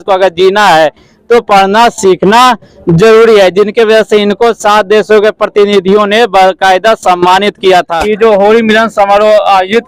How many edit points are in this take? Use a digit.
1